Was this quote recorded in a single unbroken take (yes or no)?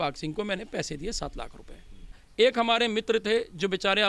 no